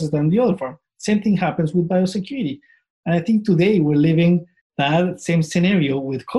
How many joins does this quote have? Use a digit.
1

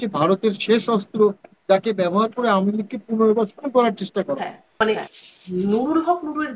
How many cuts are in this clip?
1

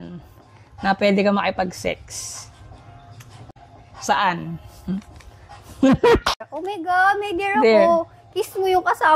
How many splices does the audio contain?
2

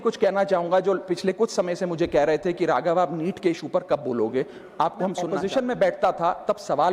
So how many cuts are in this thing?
1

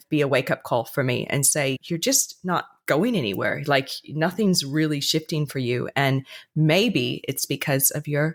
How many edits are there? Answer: 0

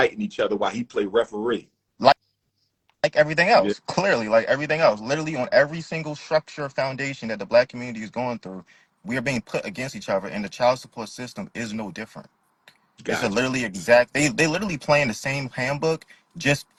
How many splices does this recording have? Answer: 0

